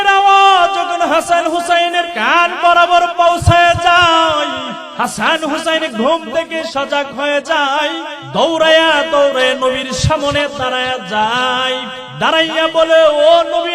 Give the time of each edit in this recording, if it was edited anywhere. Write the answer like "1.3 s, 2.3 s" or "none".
2.2 s, 4.8 s, 8.1 s, 12.0 s

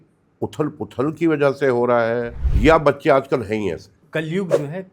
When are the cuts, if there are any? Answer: 2.4 s, 4.0 s

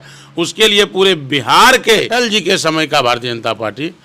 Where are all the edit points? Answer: 2.1 s

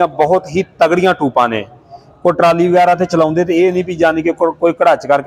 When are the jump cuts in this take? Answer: none

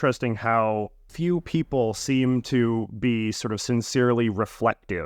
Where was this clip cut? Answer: 1.1 s

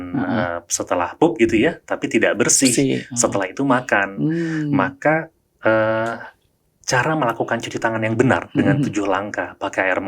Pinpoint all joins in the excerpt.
none

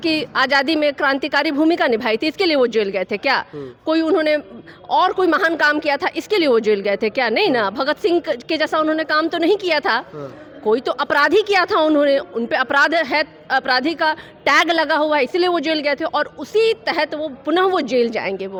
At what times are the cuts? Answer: none

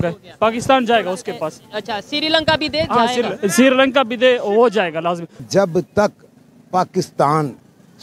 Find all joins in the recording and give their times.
5.4 s

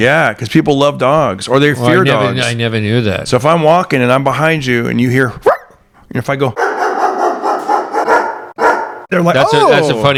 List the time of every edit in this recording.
none

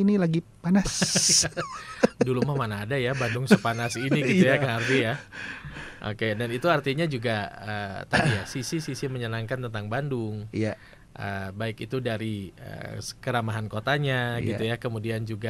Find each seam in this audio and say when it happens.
none

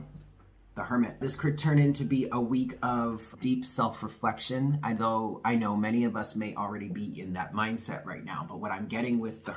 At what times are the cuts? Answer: 1.2 s, 3.3 s

